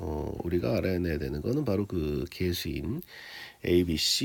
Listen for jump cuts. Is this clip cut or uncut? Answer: uncut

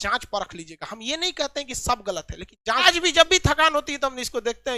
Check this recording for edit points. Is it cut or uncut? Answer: cut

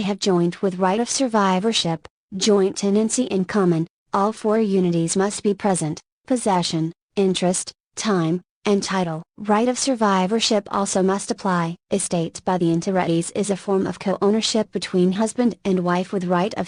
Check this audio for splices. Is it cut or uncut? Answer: uncut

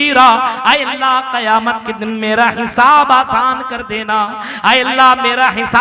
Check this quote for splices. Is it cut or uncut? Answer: uncut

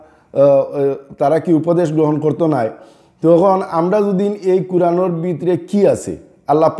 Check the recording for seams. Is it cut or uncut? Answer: uncut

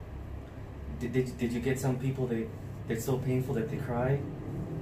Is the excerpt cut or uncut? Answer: uncut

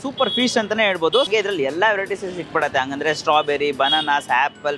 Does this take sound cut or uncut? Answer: cut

